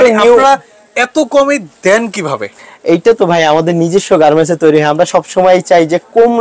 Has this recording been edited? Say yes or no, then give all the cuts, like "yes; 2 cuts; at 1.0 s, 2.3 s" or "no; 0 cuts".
no; 0 cuts